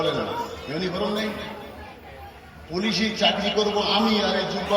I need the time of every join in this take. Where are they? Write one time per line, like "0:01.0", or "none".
none

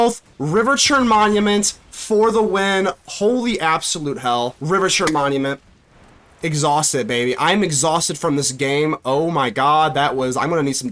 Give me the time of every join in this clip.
0:04.6

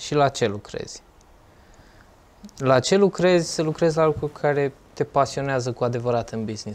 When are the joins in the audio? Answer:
none

